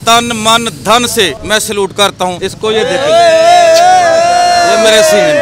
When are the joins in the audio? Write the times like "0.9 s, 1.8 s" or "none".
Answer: 1.4 s, 2.4 s